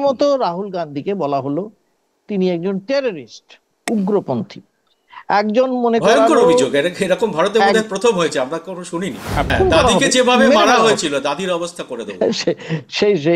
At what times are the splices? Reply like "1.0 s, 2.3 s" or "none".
9.5 s